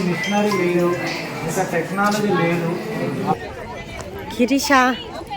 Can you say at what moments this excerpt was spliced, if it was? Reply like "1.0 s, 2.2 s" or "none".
3.3 s